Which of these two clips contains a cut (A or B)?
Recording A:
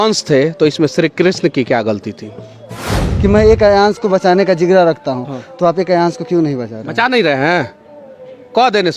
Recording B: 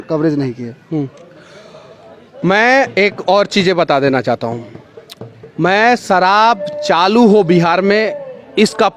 A